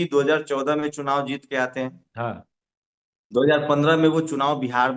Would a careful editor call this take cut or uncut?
uncut